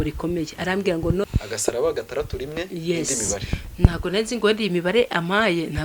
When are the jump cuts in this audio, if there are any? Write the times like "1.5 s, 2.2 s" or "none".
1.2 s